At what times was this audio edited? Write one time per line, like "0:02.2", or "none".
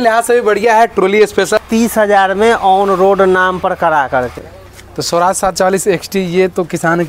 0:01.6
0:04.4